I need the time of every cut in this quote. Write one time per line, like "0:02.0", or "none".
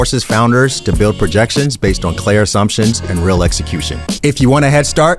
0:04.1